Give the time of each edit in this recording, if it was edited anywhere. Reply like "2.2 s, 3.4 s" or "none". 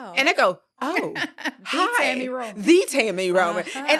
none